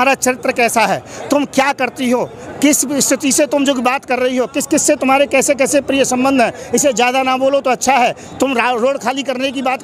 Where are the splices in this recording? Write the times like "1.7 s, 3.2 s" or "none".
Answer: none